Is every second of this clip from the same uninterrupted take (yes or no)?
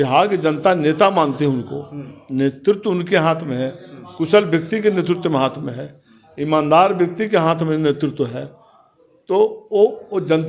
yes